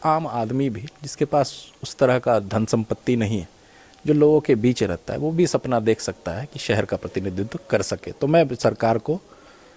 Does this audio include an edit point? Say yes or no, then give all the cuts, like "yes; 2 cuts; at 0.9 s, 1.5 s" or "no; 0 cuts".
no; 0 cuts